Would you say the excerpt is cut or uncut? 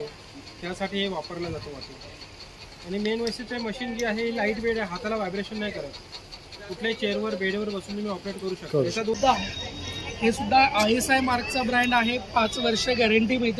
cut